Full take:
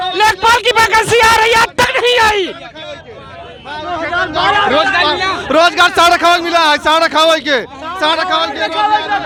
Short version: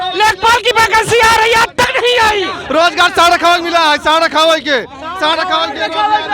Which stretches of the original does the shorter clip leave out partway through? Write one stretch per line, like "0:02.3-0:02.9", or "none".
0:02.6-0:05.4